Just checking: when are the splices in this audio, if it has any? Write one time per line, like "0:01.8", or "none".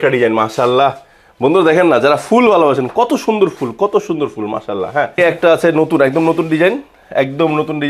0:05.2

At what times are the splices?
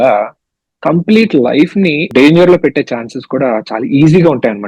0:02.1

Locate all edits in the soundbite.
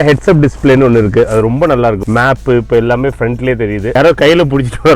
0:02.0
0:03.9

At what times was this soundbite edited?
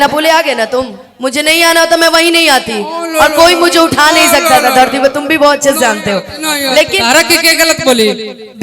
0:01.0
0:07.0

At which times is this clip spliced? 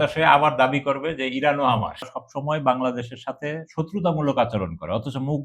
0:02.1

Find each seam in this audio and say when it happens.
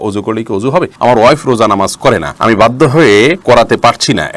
0:00.9
0:02.3
0:03.4

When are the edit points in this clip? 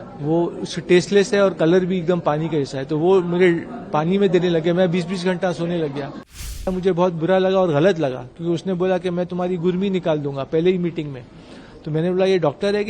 0:06.6

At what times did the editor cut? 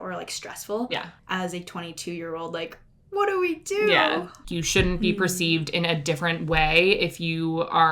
0:01.1
0:04.4

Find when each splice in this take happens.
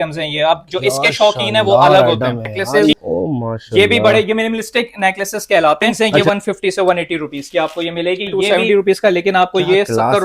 0:02.9
0:06.0
0:08.4

